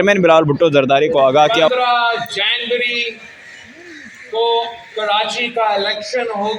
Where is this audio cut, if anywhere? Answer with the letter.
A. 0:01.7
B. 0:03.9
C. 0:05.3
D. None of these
A